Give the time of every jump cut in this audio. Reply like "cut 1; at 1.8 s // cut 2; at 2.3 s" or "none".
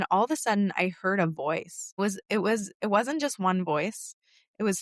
none